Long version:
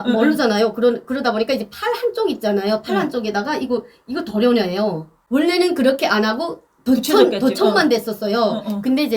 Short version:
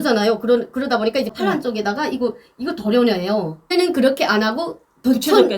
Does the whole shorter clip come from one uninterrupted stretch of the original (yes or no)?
no